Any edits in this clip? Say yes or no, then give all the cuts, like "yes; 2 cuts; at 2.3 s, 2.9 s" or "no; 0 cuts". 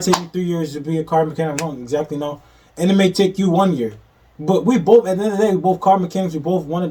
no; 0 cuts